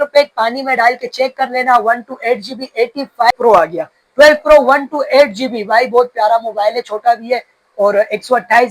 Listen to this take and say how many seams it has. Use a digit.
1